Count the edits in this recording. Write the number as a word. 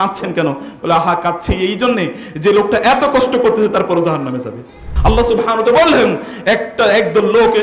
one